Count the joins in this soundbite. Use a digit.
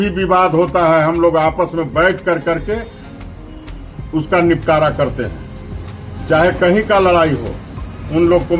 0